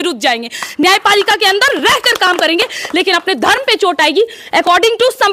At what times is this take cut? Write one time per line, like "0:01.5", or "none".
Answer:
none